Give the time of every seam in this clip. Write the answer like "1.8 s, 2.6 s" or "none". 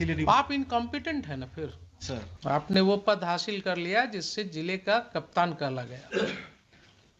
2.3 s